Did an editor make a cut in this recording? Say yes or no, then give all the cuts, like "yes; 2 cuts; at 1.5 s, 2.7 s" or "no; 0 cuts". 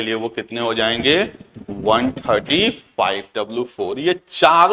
yes; 1 cut; at 3.3 s